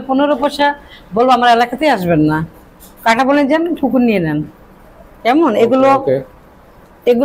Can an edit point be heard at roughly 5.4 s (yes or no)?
no